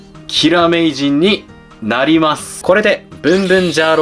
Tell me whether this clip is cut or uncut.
cut